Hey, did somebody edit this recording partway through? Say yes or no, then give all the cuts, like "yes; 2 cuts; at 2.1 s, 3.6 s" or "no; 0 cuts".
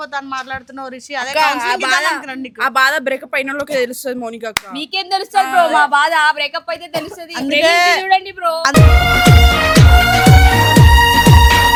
no; 0 cuts